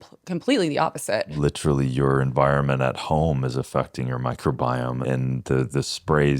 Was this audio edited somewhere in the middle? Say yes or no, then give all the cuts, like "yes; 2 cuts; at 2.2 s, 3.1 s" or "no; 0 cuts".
yes; 2 cuts; at 1.3 s, 5.0 s